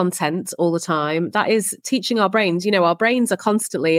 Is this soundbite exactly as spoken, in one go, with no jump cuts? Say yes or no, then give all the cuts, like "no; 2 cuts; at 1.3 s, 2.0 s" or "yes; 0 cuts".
yes; 0 cuts